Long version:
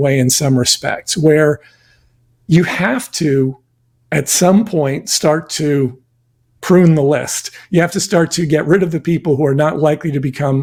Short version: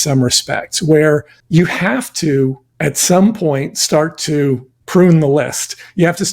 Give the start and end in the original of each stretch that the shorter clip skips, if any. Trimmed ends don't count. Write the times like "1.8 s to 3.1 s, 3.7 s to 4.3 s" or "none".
1.7 s to 2.3 s, 3.6 s to 4.0 s, 6.1 s to 6.5 s